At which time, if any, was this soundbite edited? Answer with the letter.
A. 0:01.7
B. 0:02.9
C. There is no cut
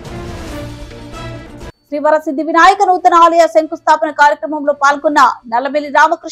A